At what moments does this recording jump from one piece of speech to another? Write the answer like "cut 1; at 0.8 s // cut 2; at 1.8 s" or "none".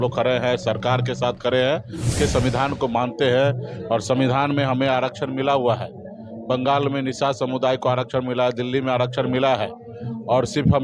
cut 1; at 2.1 s